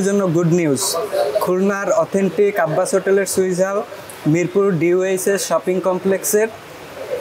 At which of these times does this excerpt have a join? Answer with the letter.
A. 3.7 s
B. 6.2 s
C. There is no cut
C